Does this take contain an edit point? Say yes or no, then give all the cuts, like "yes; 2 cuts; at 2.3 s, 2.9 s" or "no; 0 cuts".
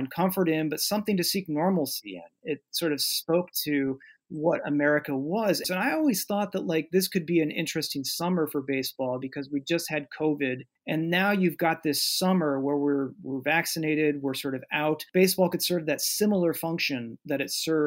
yes; 3 cuts; at 5.7 s, 10.7 s, 15.0 s